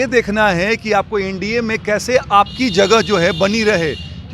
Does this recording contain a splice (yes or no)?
no